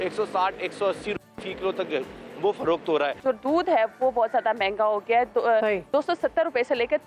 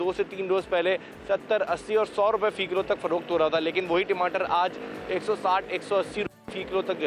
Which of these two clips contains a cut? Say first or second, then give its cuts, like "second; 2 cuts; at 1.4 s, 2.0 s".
first; 1 cut; at 3.2 s